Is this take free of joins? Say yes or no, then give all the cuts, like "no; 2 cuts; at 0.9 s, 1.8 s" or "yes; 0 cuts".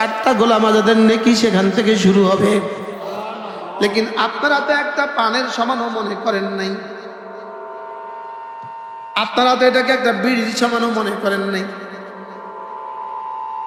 yes; 0 cuts